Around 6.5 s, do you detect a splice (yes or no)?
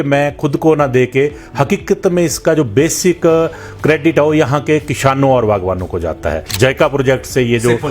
yes